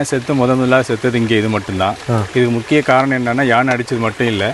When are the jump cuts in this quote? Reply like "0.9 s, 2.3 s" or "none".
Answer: none